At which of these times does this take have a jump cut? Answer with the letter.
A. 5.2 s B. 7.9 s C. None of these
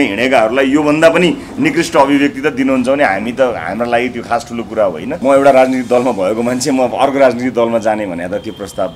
A